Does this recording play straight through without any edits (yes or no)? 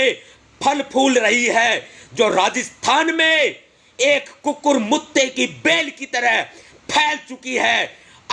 yes